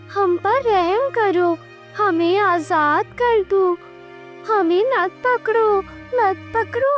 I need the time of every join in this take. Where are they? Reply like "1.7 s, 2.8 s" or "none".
none